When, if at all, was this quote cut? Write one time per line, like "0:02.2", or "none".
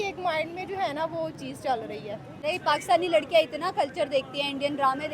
0:02.4